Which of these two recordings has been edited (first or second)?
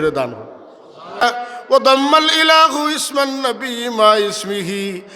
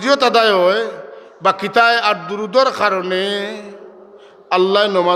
first